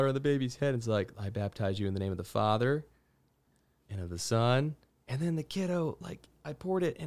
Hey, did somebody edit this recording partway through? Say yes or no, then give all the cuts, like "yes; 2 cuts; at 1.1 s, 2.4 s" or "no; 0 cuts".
no; 0 cuts